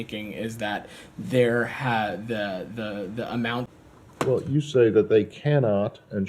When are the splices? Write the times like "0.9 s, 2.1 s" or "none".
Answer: 3.7 s